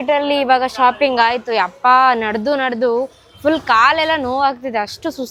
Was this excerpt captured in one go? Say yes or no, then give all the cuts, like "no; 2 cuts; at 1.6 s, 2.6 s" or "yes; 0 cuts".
yes; 0 cuts